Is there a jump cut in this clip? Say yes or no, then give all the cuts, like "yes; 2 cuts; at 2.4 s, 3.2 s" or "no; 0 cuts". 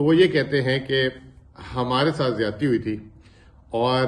no; 0 cuts